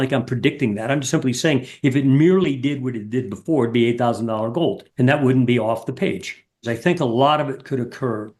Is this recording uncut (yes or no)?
no